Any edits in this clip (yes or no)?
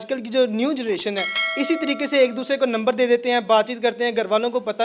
no